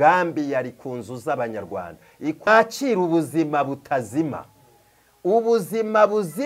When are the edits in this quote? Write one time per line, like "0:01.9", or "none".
0:02.5